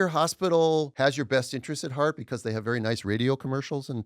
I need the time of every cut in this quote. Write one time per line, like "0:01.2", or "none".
0:00.9